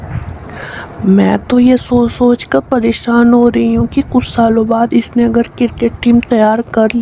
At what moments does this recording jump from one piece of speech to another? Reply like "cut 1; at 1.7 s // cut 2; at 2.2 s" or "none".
none